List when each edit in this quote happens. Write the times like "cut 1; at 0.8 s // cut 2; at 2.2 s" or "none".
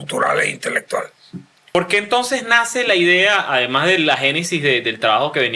cut 1; at 1.8 s